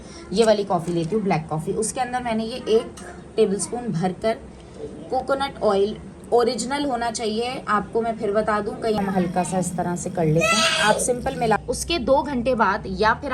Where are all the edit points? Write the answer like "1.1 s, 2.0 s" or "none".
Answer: 9.0 s, 11.6 s